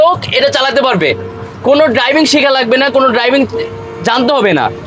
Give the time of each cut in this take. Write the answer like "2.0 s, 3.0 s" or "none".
none

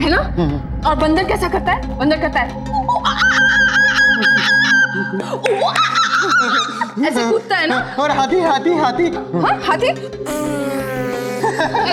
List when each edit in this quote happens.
none

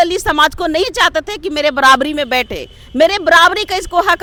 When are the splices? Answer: none

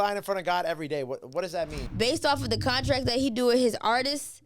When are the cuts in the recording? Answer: 1.8 s

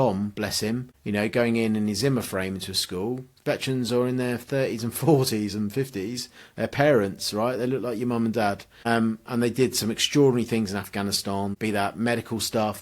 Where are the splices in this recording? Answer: 0.9 s, 8.7 s, 11.6 s

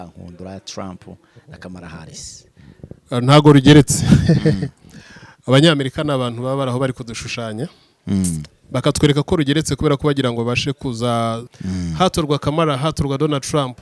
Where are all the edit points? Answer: 11.5 s

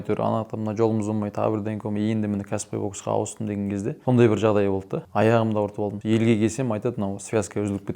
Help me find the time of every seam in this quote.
4.0 s, 5.0 s, 6.0 s

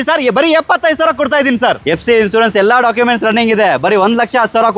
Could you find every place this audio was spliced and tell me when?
1.8 s

